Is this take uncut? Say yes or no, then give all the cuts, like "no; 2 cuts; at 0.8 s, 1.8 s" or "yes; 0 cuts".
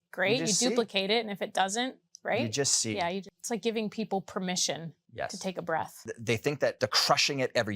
no; 4 cuts; at 3.3 s, 5.0 s, 6.0 s, 6.8 s